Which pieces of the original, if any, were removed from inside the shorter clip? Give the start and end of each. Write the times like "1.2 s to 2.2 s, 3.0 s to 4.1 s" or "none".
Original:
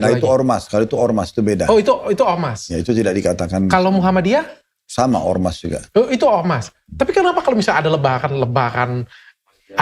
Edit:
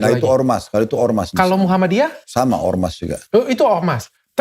1.3 s to 3.7 s, 4.5 s to 4.8 s